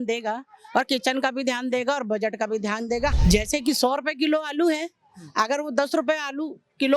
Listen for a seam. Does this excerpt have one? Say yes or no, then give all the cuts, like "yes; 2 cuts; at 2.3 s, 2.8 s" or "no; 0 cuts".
yes; 1 cut; at 3.1 s